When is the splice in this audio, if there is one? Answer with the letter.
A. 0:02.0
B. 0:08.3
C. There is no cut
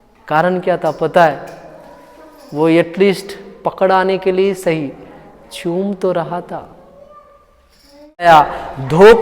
B